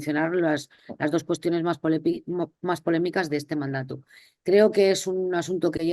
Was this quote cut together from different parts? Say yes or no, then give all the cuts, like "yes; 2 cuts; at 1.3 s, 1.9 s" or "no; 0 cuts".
no; 0 cuts